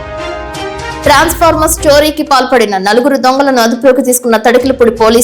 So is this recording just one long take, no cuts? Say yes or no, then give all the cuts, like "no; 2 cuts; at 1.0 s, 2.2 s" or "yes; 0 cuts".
no; 1 cut; at 1.0 s